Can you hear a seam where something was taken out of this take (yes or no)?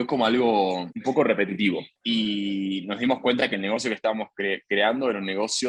yes